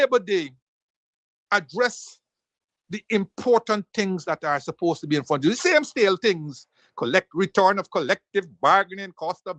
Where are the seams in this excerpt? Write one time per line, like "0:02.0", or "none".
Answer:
none

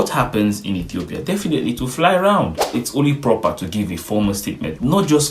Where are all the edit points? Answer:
0:02.8

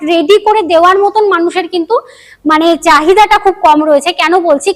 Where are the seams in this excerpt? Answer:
none

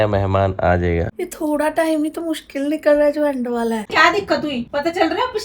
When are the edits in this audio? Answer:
0:01.2
0:03.9

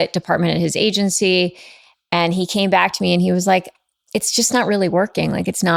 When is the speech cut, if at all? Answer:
none

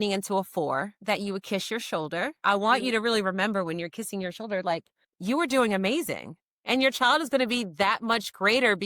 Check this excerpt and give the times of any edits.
0:00.9
0:02.4

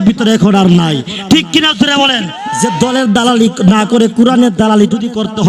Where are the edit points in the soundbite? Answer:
0:02.4

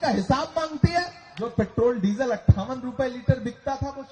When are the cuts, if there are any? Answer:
0:01.5

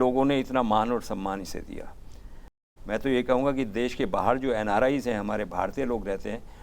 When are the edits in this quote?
0:02.7

